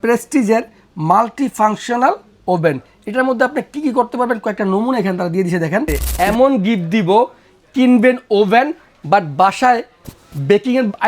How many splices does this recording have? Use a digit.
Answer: 1